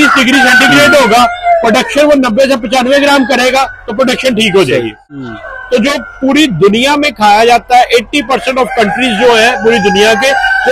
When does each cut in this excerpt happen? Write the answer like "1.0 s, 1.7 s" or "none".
5.2 s